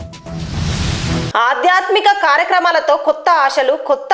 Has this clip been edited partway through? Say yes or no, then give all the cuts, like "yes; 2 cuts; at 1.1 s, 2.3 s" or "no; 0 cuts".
yes; 1 cut; at 1.3 s